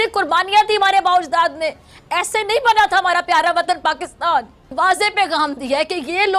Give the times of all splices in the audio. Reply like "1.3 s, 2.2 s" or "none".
4.7 s